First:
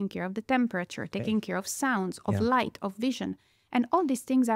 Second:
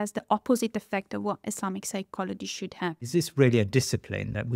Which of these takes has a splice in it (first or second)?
second